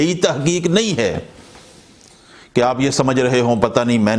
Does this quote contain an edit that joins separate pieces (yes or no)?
no